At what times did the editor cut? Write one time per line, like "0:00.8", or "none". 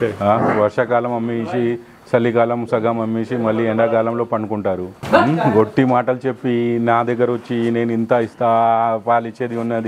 0:04.9